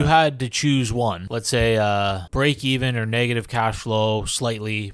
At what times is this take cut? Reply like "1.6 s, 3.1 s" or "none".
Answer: 1.3 s, 2.2 s